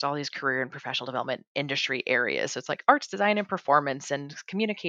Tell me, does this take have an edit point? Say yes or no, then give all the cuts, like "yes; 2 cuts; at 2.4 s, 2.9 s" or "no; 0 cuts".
no; 0 cuts